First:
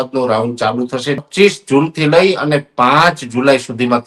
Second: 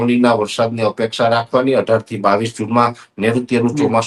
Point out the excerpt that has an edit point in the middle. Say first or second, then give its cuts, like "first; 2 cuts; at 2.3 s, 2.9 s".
first; 1 cut; at 1.2 s